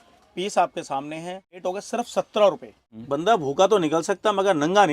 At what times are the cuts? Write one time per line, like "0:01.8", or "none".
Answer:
0:01.5
0:02.8